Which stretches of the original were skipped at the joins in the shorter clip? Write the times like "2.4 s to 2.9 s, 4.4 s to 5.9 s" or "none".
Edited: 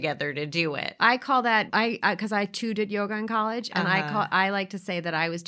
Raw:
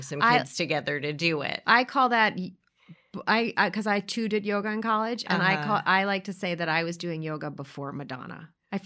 2.3 s to 3.2 s